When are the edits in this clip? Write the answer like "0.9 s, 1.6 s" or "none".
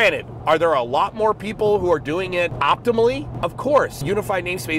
2.5 s, 3.3 s, 4.0 s